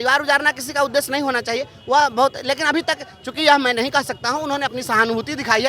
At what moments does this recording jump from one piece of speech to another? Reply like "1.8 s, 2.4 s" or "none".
none